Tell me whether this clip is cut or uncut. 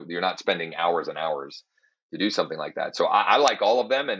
uncut